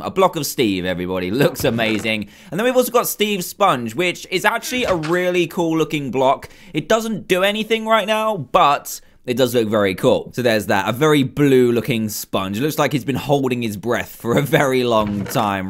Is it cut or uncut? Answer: uncut